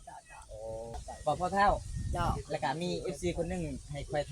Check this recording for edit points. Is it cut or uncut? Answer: cut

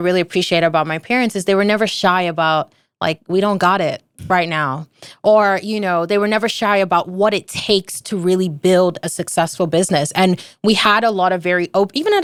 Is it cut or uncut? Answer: uncut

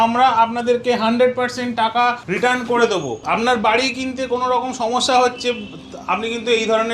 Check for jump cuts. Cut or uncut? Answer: cut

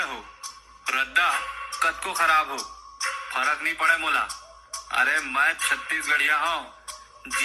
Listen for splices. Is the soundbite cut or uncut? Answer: uncut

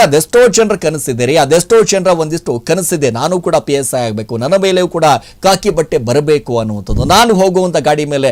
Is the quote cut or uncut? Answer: uncut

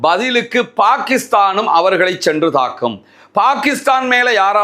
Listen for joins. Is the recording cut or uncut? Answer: uncut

